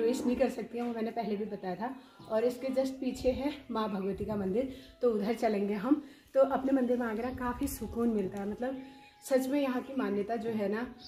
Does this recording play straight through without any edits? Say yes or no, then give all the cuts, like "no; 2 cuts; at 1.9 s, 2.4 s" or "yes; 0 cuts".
yes; 0 cuts